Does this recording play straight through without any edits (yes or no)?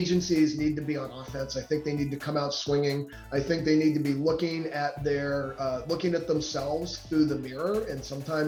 yes